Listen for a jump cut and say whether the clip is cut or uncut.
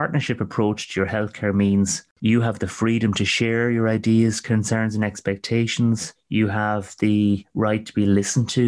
cut